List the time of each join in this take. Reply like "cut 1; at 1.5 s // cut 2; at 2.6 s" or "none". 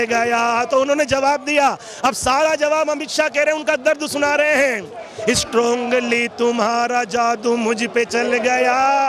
none